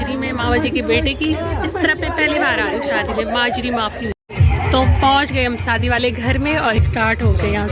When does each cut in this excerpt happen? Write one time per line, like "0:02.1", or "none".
none